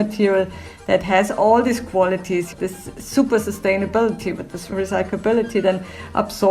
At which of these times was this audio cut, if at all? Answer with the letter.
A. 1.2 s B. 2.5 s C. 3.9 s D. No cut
B